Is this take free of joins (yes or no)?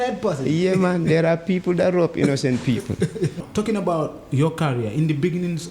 no